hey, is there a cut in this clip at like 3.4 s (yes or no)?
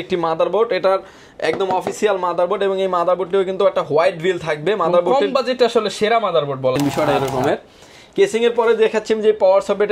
no